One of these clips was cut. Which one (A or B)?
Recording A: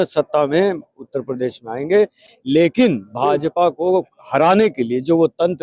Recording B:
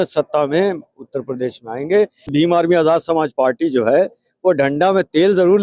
B